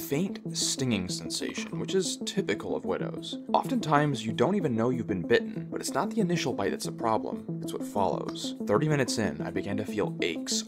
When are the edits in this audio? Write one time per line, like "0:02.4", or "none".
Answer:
none